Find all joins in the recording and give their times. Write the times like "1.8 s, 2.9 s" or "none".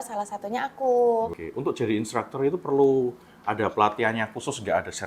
1.3 s